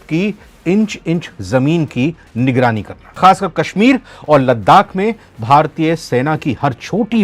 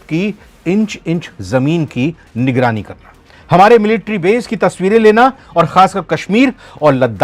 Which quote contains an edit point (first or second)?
first